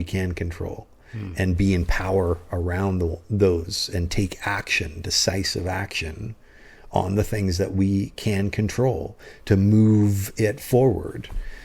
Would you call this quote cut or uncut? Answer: uncut